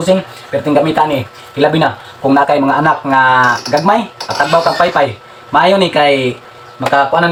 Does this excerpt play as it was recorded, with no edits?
yes; 0 cuts

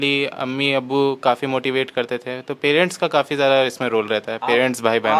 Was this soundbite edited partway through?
no; 0 cuts

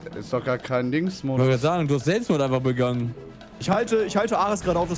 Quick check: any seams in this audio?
yes; 1 cut; at 3.8 s

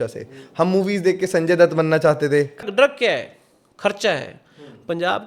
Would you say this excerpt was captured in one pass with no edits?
no; 1 cut; at 2.6 s

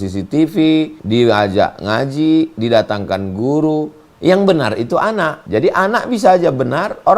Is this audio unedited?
no; 2 cuts; at 1.0 s, 5.4 s

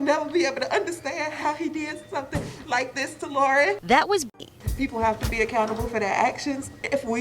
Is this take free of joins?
no; 1 cut; at 4.3 s

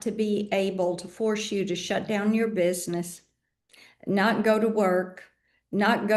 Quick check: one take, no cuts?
yes; 0 cuts

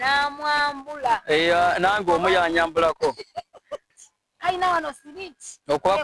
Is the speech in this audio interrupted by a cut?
yes; 1 cut; at 3.9 s

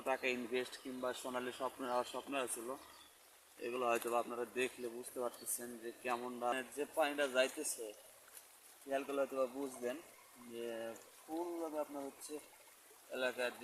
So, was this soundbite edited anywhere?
yes; 1 cut; at 6.5 s

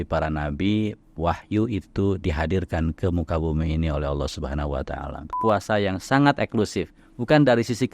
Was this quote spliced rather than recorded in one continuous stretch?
yes; 1 cut; at 5.4 s

